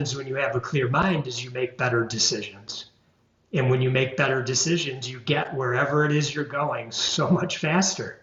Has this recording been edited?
no; 0 cuts

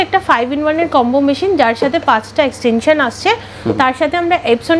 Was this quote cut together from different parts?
no; 0 cuts

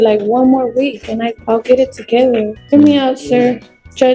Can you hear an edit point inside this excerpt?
yes; 1 cut; at 2.6 s

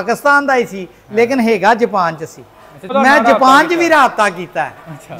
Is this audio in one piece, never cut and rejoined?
no; 1 cut; at 2.9 s

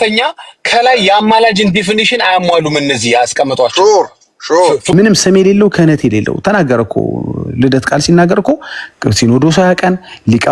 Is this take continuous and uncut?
no; 1 cut; at 4.9 s

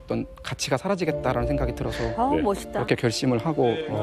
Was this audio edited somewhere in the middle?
no; 0 cuts

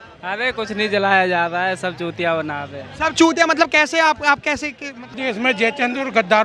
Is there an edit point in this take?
yes; 1 cut; at 5.2 s

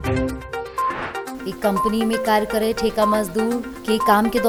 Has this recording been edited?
no; 0 cuts

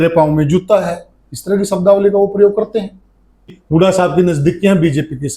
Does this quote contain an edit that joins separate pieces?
yes; 1 cut; at 3.6 s

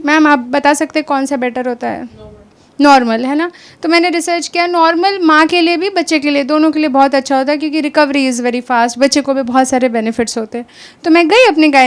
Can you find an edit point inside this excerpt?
no; 0 cuts

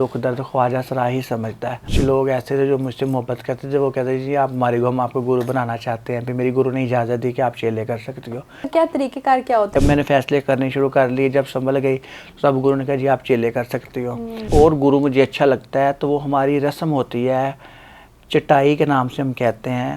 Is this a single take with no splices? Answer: no; 4 cuts; at 1.9 s, 8.7 s, 9.8 s, 14.4 s

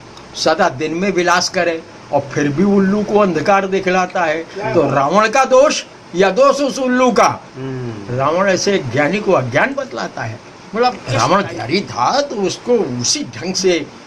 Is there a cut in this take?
yes; 1 cut; at 11.1 s

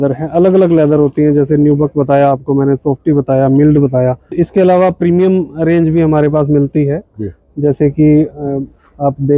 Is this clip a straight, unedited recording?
no; 1 cut; at 4.2 s

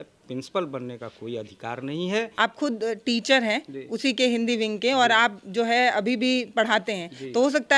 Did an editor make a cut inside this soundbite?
yes; 1 cut; at 2.3 s

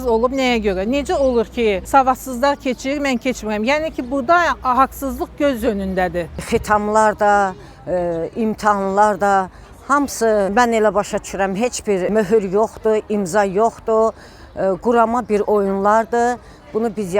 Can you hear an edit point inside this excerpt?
yes; 4 cuts; at 1.8 s, 6.4 s, 10.5 s, 12.1 s

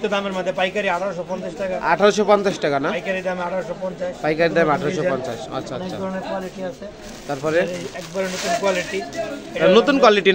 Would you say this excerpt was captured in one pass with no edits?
yes; 0 cuts

